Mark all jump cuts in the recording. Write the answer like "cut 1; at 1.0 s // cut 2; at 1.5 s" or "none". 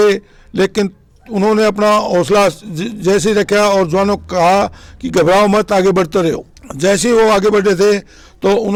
none

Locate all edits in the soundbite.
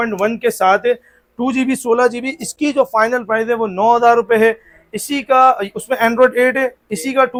none

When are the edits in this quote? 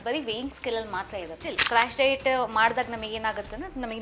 cut 1; at 1.5 s

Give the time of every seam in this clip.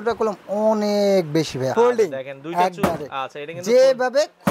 cut 1; at 1.7 s

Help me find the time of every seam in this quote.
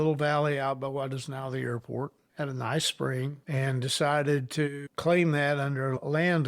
cut 1; at 2.2 s // cut 2; at 3.4 s // cut 3; at 4.9 s

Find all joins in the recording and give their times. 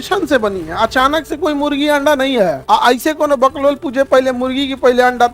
cut 1; at 2.6 s

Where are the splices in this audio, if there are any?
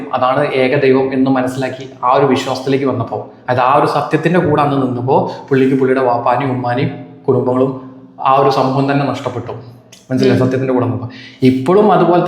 none

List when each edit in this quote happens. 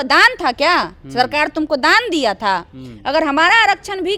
none

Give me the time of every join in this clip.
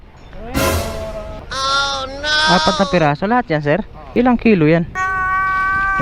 cut 1; at 1.4 s // cut 2; at 4.0 s

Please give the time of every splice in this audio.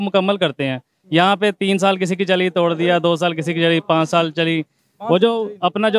none

